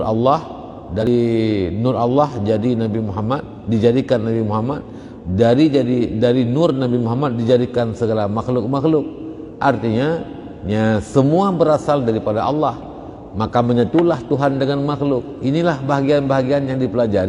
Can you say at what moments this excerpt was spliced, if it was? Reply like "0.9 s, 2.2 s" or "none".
1.0 s